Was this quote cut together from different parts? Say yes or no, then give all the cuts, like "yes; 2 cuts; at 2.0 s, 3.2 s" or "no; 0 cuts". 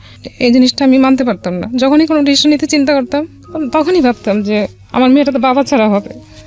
no; 0 cuts